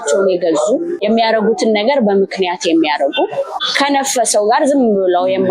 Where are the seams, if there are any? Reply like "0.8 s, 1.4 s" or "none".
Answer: 1.0 s, 3.6 s